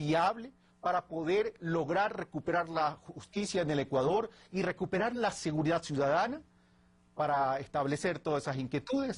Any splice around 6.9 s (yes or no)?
no